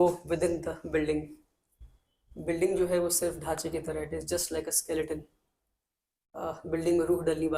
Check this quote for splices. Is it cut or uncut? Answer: uncut